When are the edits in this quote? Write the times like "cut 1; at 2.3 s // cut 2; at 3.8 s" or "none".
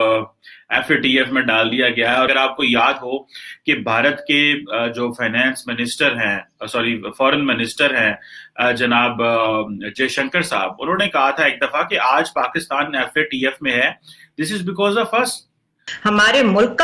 cut 1; at 2.3 s // cut 2; at 15.9 s